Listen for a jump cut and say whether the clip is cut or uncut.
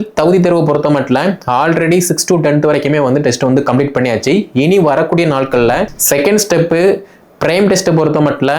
cut